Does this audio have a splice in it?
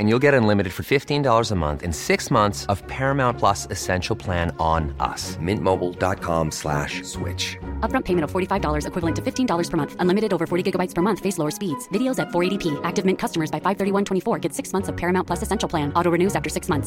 no; 0 cuts

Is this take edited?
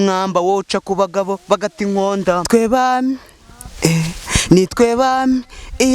yes; 1 cut; at 2.4 s

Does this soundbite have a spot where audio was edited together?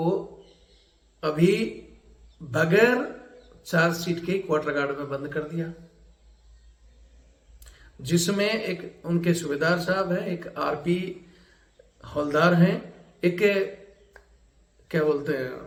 no; 0 cuts

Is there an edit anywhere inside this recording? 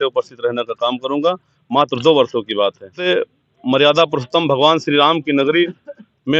yes; 1 cut; at 3.0 s

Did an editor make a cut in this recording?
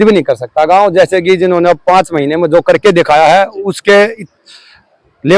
no; 0 cuts

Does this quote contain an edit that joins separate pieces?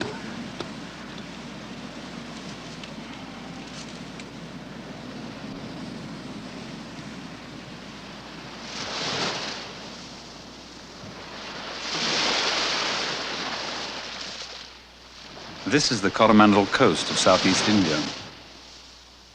yes; 1 cut; at 15.6 s

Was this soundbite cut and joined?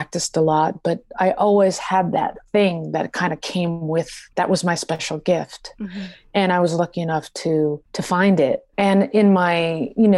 yes; 3 cuts; at 4.2 s, 7.9 s, 8.7 s

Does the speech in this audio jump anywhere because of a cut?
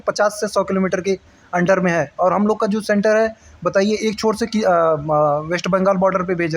no; 0 cuts

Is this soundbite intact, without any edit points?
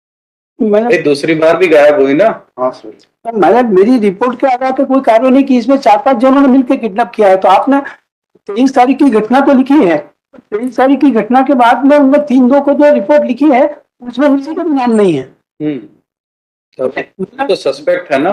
yes; 0 cuts

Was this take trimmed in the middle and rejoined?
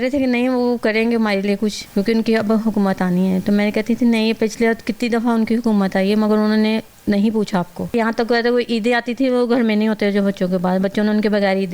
yes; 2 cuts; at 1.8 s, 7.9 s

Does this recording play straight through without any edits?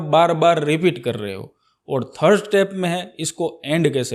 yes; 0 cuts

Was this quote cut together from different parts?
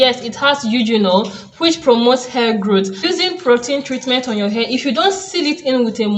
yes; 1 cut; at 3.0 s

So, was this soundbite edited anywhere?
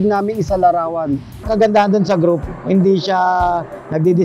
yes; 1 cut; at 1.3 s

